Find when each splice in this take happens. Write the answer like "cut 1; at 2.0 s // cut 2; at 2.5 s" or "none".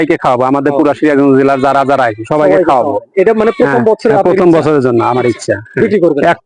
none